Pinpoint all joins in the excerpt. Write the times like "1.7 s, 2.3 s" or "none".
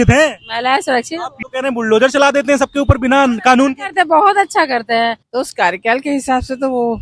1.2 s, 5.2 s